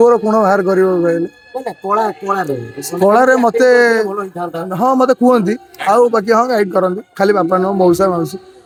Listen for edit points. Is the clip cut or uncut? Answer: uncut